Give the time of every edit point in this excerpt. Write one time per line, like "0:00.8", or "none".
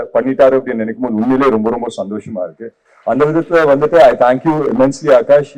none